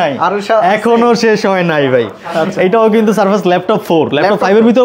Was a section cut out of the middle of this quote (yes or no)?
no